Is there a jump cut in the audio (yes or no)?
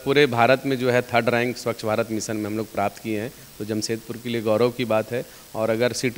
no